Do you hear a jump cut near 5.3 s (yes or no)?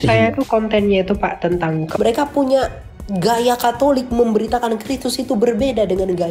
no